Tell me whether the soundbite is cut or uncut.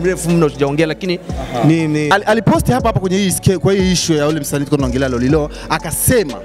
cut